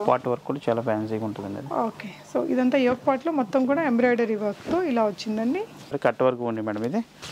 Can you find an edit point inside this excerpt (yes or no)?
yes